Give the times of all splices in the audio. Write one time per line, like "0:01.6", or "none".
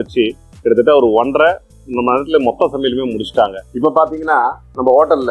0:03.6